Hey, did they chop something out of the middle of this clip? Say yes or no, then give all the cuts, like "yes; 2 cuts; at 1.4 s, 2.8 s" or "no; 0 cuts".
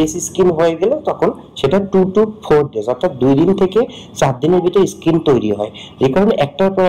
no; 0 cuts